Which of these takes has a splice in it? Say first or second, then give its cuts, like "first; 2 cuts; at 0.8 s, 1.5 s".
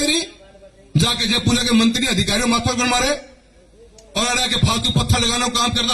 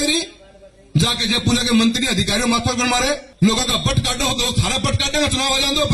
second; 1 cut; at 3.3 s